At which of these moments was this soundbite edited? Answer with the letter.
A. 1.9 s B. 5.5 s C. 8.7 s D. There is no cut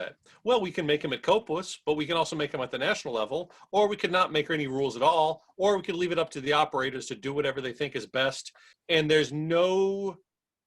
C